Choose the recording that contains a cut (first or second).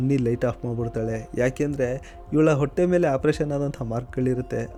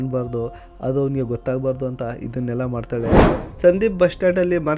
second